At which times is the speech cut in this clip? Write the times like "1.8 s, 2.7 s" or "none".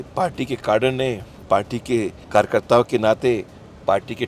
2.2 s

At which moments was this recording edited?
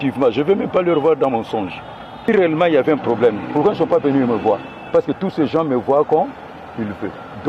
2.3 s

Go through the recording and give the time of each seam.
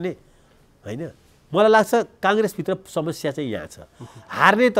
1.3 s

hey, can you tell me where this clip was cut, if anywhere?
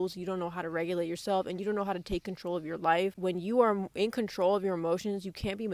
none

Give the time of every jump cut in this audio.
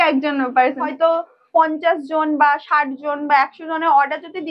0.9 s

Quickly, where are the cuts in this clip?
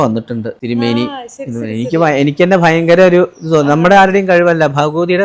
none

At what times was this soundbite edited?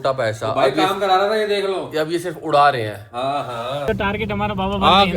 3.9 s

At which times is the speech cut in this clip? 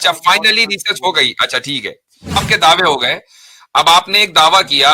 2.4 s

